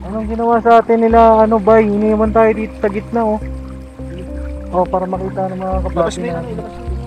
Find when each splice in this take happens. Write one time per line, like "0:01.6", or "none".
none